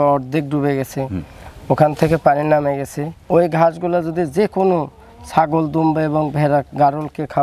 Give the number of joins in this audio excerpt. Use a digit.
0